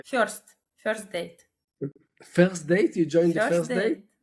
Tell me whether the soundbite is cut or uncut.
uncut